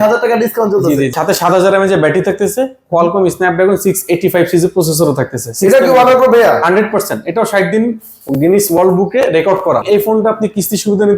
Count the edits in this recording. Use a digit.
2